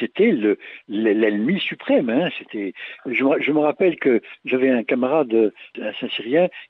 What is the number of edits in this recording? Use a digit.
1